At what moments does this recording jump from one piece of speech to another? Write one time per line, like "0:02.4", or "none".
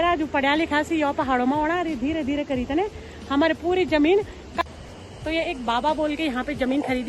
0:04.6